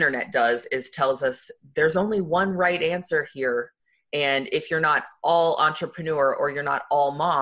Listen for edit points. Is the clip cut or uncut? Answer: cut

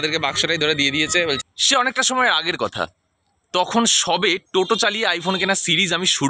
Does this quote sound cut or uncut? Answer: cut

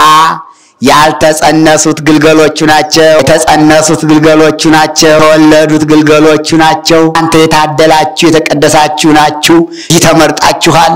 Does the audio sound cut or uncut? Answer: cut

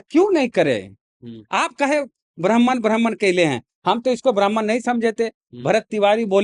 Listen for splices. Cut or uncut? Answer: uncut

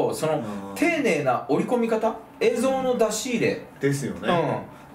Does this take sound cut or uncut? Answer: uncut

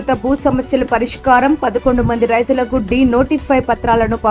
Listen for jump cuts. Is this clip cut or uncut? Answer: uncut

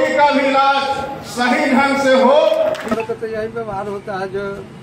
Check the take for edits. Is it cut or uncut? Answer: cut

